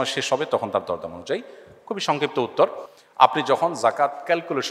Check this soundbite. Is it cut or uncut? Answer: uncut